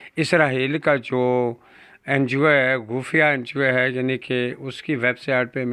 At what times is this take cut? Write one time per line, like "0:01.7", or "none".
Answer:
none